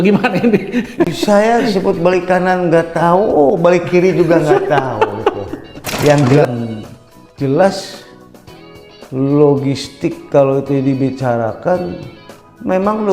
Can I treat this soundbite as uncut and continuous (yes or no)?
no